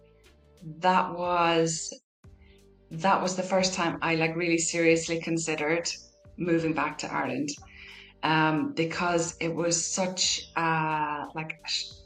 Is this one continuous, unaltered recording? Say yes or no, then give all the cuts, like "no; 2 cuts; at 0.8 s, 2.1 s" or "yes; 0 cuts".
yes; 0 cuts